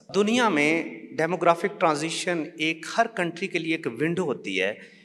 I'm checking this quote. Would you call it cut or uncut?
uncut